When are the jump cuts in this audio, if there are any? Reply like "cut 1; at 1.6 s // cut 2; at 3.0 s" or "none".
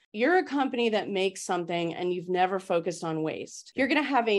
none